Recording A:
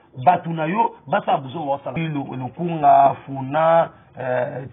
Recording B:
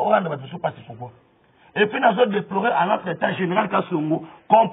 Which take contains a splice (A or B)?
A